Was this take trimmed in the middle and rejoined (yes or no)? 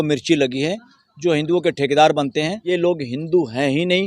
yes